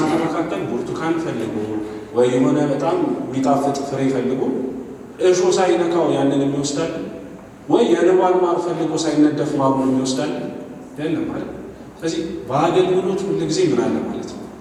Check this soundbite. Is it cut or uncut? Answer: uncut